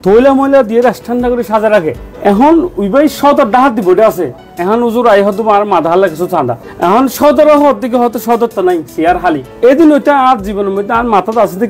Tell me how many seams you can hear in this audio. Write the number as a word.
two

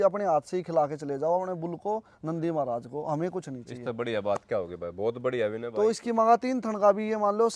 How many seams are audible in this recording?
one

